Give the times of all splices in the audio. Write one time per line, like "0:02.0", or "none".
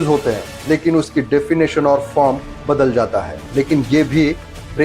0:03.5